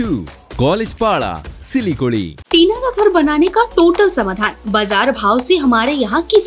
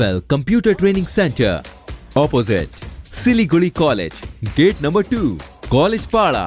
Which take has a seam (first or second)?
first